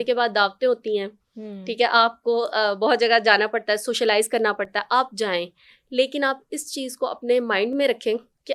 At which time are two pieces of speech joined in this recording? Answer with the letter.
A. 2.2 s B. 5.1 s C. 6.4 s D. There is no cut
D